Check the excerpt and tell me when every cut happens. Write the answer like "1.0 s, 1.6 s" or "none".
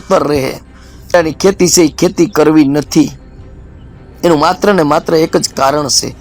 1.1 s